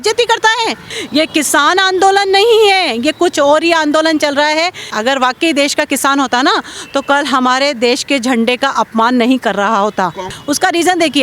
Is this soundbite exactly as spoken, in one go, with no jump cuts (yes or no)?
no